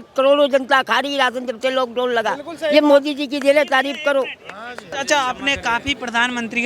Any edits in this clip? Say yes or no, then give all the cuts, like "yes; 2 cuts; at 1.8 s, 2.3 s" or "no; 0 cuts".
yes; 1 cut; at 4.9 s